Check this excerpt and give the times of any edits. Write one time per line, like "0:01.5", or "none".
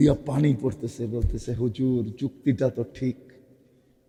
none